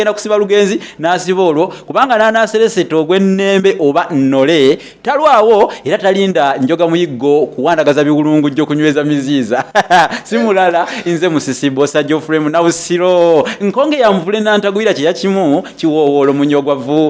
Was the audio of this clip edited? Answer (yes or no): no